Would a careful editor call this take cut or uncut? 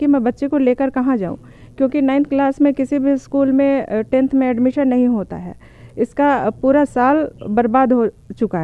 uncut